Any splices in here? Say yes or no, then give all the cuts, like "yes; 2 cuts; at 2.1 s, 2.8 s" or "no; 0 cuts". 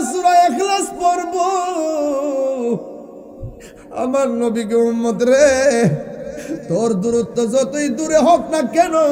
no; 0 cuts